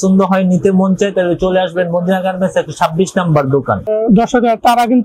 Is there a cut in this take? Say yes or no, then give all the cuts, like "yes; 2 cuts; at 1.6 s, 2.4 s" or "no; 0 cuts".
yes; 1 cut; at 3.9 s